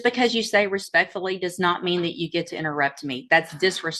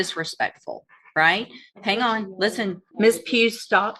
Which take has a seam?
second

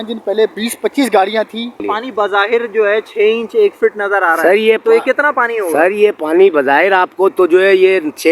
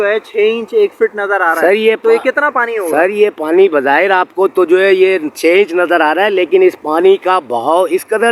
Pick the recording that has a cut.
first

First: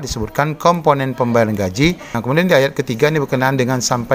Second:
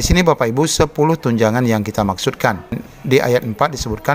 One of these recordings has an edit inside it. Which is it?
first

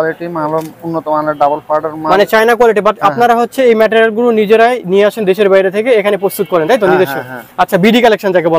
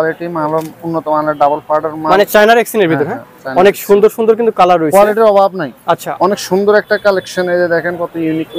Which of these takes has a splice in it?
second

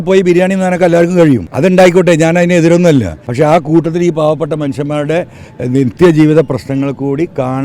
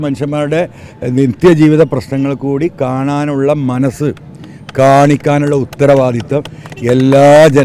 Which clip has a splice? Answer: first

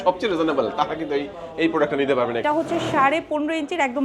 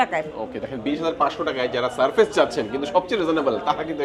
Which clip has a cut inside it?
first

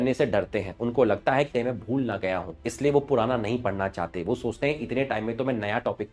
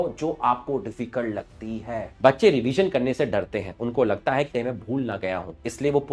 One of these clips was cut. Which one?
second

